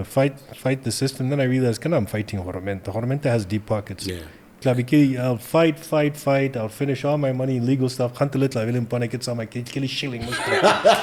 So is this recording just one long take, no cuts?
yes; 0 cuts

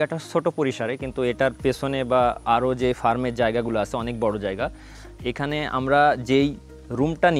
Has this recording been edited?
no; 0 cuts

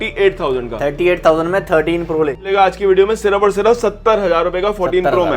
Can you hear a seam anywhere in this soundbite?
yes; 1 cut; at 2.4 s

